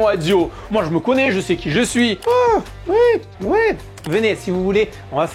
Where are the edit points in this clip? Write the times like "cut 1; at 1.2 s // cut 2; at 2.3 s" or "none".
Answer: cut 1; at 2.2 s